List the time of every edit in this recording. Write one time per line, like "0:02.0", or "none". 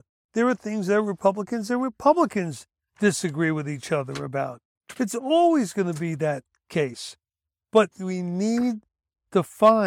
none